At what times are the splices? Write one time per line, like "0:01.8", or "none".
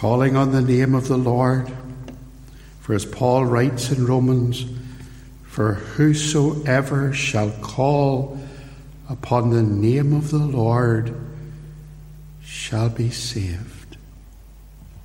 none